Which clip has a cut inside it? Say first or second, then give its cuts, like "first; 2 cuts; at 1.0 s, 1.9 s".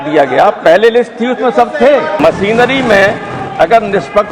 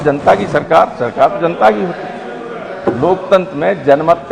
first; 1 cut; at 2.2 s